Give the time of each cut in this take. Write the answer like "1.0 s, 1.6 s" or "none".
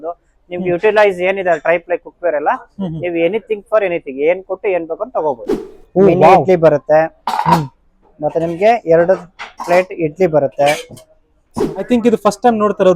5.5 s, 11.9 s